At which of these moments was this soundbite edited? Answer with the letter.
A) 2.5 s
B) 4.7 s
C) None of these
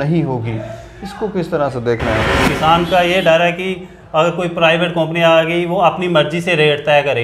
A